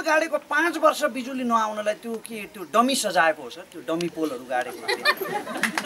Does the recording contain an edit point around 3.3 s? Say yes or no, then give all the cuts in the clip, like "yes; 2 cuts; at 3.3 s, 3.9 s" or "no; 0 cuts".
no; 0 cuts